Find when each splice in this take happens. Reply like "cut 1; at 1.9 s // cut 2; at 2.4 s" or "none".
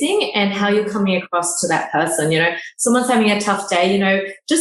none